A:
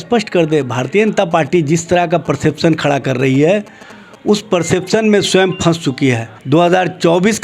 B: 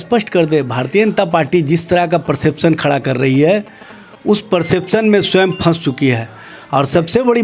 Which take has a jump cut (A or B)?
A